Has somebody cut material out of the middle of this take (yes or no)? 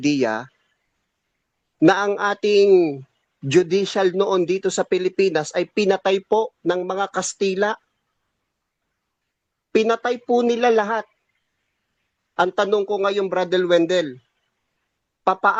no